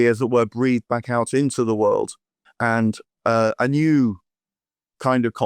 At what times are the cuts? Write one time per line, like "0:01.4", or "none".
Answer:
0:02.4